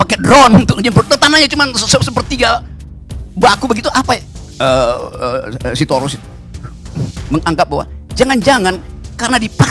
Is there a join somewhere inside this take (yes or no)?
yes